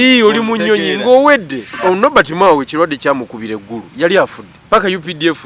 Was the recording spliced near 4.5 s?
yes; 2 cuts; at 1.6 s, 4.5 s

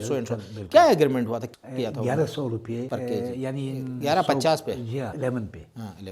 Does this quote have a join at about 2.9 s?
yes; 4 cuts; at 1.4 s, 2.9 s, 4.0 s, 5.1 s

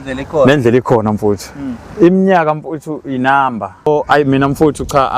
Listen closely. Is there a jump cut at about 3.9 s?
yes; 1 cut; at 3.9 s

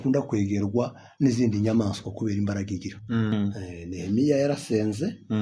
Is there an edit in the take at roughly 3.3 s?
yes; 1 cut; at 3.3 s

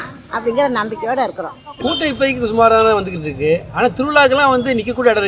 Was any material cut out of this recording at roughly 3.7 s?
no; 1 cut; at 1.6 s

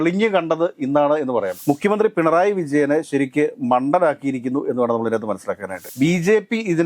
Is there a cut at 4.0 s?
no; 2 cuts; at 1.5 s, 5.8 s

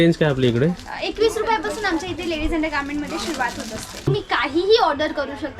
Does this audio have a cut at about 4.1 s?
yes; 1 cut; at 4.1 s

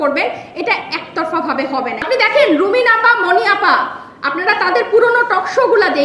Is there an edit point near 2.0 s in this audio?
yes; 1 cut; at 2.0 s

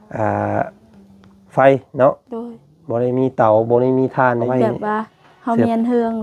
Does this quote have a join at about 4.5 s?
yes; 1 cut; at 4.5 s

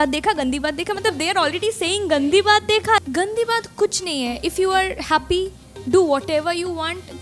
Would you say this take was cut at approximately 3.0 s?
yes; 1 cut; at 3.0 s

